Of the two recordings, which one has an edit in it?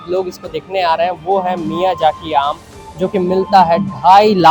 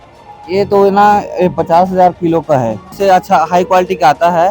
second; 1 cut; at 2.9 s

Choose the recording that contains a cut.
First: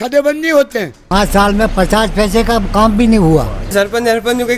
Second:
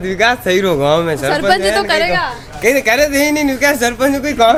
first; 2 cuts; at 1.0 s, 3.7 s

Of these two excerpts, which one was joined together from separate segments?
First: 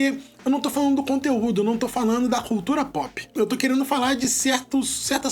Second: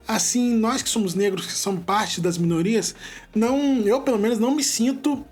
first; 1 cut; at 3.2 s

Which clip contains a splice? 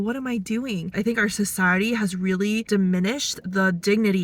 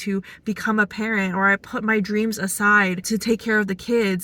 first; 1 cut; at 0.9 s

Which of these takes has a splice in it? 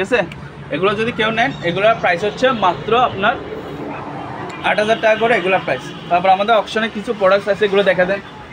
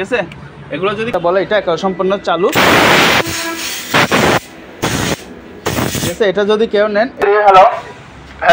second; 2 cuts; at 1.1 s, 7.2 s

